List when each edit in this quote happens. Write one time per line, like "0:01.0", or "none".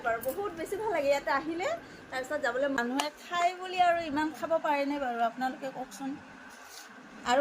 0:02.8